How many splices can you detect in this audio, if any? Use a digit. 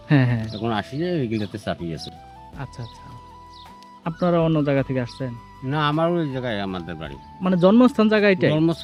0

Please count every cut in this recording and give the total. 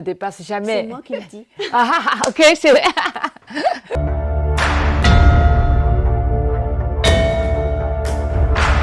1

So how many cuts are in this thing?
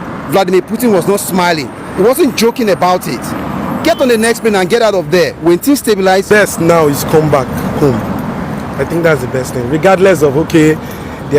1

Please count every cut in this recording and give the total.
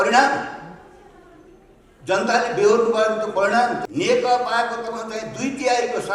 1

